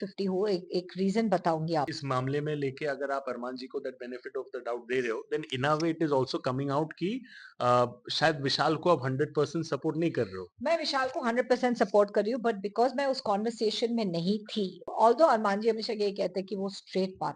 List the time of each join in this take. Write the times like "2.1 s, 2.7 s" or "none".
1.9 s, 14.8 s